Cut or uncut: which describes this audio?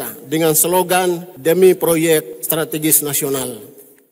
cut